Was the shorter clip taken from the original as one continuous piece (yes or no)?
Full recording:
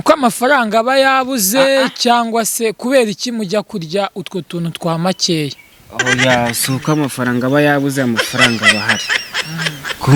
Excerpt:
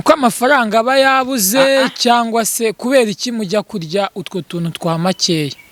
yes